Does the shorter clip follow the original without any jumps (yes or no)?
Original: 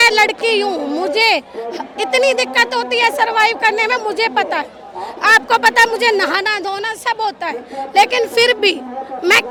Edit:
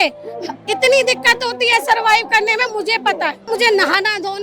no